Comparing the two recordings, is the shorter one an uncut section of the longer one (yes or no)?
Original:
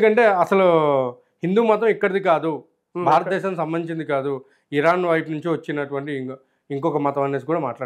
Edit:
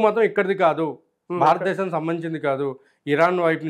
yes